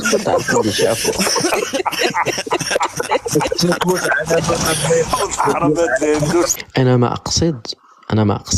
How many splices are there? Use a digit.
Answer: 1